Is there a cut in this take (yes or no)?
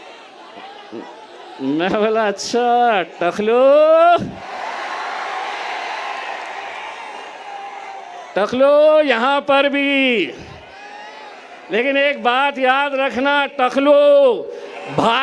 no